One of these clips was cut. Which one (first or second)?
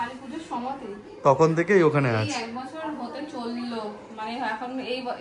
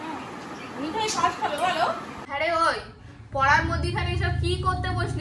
second